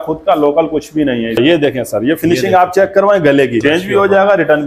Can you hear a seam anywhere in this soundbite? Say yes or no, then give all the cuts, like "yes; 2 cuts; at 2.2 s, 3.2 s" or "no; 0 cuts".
yes; 2 cuts; at 1.4 s, 3.6 s